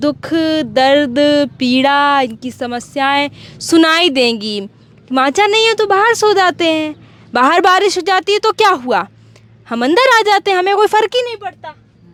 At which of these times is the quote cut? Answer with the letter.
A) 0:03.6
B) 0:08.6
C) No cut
C